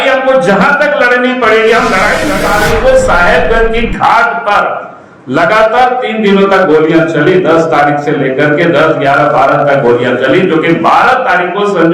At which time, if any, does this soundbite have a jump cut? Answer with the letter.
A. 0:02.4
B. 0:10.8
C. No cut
A